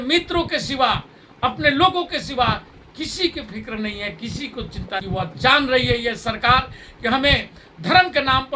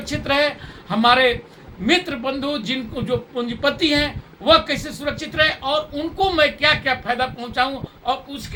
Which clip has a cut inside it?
first; 1 cut; at 5.0 s

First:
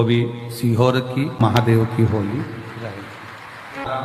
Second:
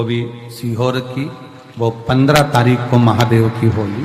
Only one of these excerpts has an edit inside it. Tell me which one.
first; 1 cut; at 1.4 s

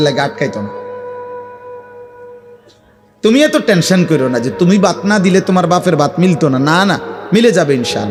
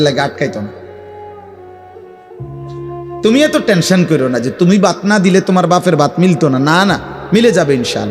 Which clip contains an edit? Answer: second; 2 cuts; at 1.0 s, 3.2 s

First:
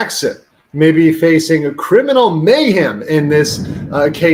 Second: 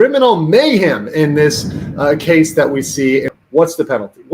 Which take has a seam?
second; 1 cut; at 3.3 s

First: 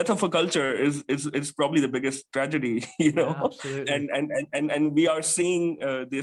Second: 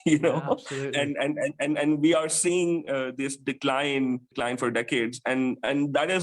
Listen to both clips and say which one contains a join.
second; 1 cut; at 4.3 s

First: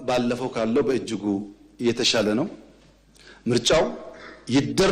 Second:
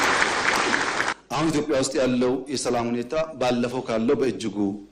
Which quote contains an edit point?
second; 1 cut; at 1.1 s

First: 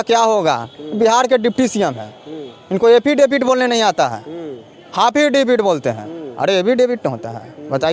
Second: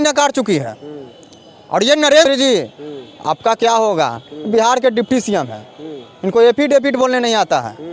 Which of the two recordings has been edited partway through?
second; 1 cut; at 2.2 s

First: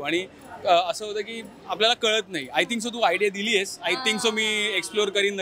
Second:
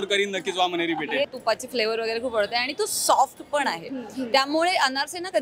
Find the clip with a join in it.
second; 1 cut; at 1.3 s

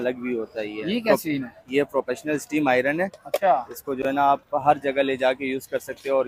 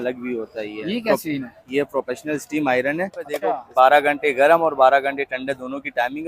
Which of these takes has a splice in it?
second; 1 cut; at 3.6 s

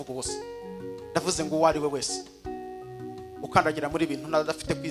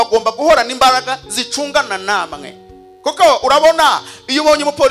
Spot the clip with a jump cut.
first; 2 cuts; at 2.1 s, 3.5 s

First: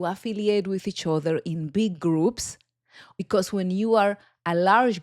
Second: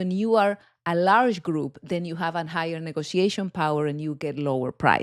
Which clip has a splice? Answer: first; 1 cut; at 2.7 s

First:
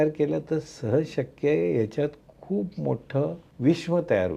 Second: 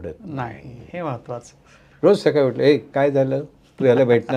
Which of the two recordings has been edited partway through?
first; 1 cut; at 3.5 s

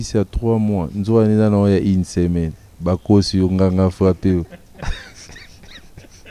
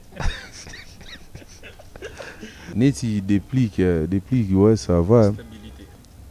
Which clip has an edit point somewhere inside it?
second; 1 cut; at 2.6 s

